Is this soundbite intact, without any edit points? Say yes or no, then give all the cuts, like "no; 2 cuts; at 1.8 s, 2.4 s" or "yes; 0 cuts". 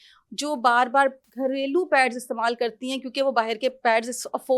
no; 1 cut; at 1.3 s